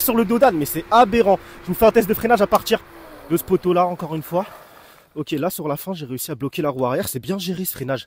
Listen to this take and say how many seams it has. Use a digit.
0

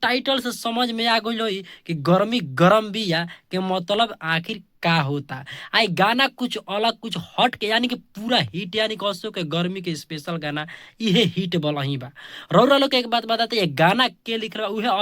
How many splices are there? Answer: 1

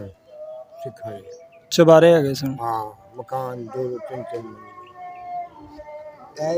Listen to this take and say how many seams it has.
0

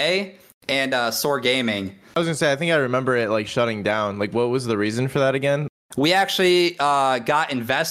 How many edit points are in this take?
2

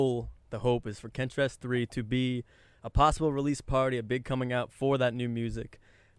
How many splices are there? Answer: 0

